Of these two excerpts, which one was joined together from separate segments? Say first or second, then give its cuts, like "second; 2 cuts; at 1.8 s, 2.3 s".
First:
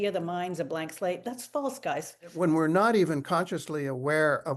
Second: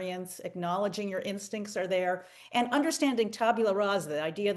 first; 1 cut; at 2.3 s